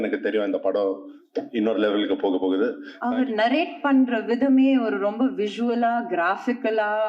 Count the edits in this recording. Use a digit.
1